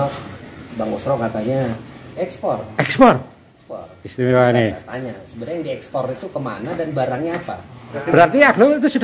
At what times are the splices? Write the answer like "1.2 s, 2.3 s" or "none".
2.2 s, 8.1 s